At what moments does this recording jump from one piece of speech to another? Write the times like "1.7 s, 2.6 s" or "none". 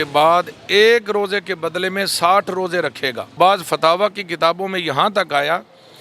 3.2 s